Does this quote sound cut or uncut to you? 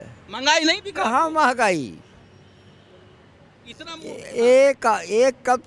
uncut